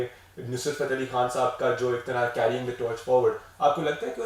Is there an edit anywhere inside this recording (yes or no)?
no